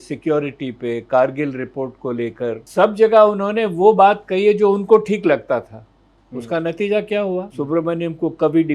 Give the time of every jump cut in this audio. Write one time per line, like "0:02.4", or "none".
0:02.6
0:07.5